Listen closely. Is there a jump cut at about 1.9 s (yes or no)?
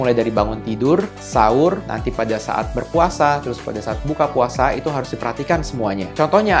yes